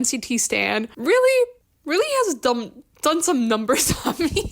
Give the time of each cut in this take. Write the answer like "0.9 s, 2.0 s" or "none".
0.9 s, 1.7 s